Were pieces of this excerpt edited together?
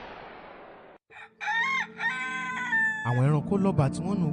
yes; 1 cut; at 1.2 s

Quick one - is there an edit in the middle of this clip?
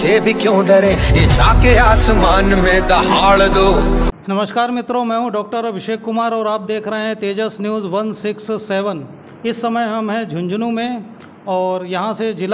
no; 0 cuts

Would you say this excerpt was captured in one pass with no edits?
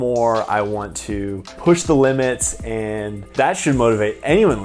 no; 2 cuts; at 1.5 s, 3.2 s

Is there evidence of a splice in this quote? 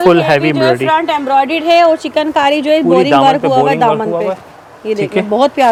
no; 0 cuts

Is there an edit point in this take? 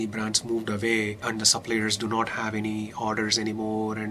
yes; 1 cut; at 1.2 s

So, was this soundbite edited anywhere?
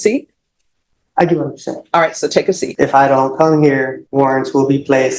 yes; 2 cuts; at 2.7 s, 4.0 s

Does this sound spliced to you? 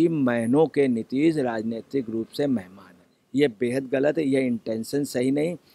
yes; 1 cut; at 3.2 s

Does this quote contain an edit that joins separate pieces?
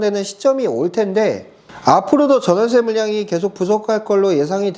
no; 0 cuts

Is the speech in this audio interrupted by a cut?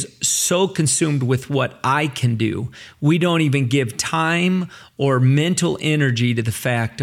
no; 0 cuts

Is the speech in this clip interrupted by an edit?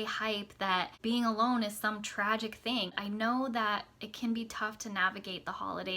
yes; 2 cuts; at 0.9 s, 2.9 s

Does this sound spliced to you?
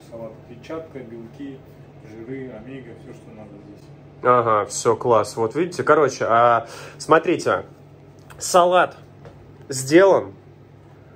no; 0 cuts

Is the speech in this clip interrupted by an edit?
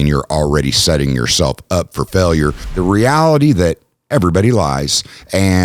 yes; 1 cut; at 2.6 s

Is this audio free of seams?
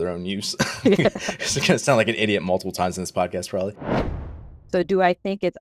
no; 1 cut; at 4.1 s

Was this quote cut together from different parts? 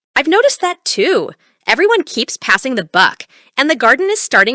yes; 1 cut; at 1.7 s

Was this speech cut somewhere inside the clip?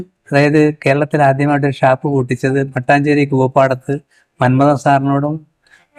no; 0 cuts

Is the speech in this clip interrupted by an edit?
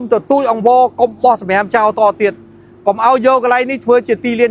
no; 0 cuts

